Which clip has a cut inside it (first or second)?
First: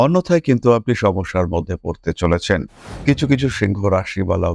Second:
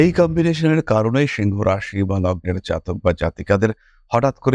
first